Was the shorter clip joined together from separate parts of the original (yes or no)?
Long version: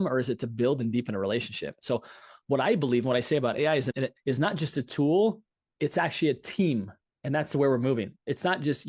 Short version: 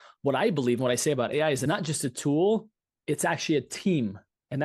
yes